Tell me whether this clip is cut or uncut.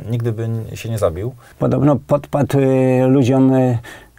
cut